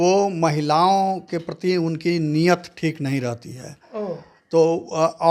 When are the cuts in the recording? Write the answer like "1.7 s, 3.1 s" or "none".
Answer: none